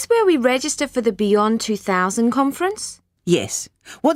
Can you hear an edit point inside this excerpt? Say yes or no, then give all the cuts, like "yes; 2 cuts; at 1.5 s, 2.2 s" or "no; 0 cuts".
no; 0 cuts